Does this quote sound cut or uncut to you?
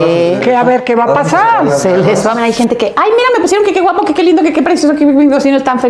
cut